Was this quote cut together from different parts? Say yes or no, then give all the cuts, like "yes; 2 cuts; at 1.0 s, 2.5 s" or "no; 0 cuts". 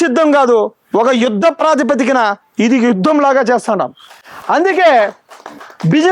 no; 0 cuts